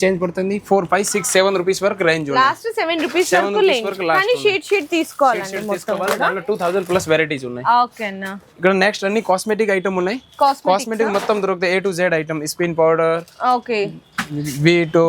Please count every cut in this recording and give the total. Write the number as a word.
zero